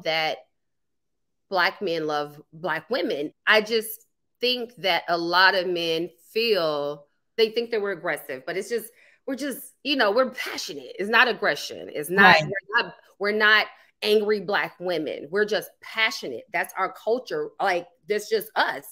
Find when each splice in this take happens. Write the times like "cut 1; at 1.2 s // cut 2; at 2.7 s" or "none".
cut 1; at 3.3 s // cut 2; at 7.3 s